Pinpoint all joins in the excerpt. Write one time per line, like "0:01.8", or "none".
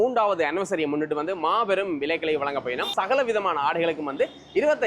0:02.9